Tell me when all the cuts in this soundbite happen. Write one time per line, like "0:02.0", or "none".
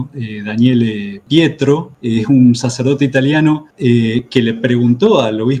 none